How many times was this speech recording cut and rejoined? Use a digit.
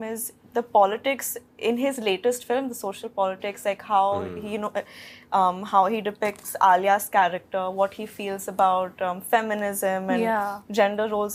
0